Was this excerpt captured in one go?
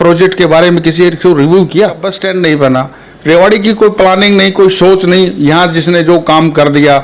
no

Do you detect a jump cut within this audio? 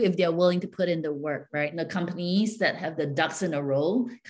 yes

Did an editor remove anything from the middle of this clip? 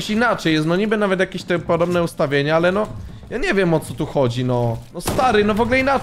no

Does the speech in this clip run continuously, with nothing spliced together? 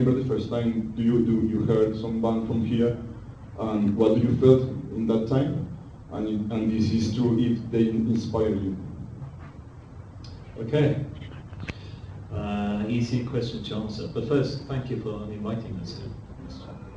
yes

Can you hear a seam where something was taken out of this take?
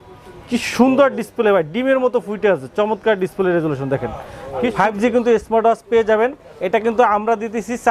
yes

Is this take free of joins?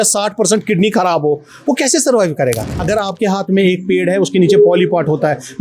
no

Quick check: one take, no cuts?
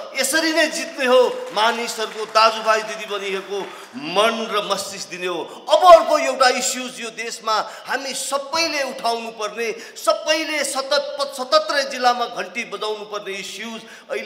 yes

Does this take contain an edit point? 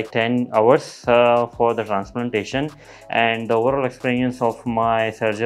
no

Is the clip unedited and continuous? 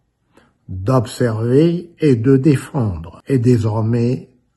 no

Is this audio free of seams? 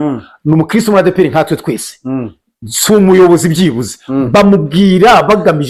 yes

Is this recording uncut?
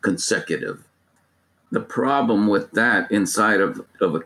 no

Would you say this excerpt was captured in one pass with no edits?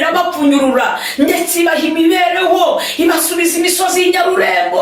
yes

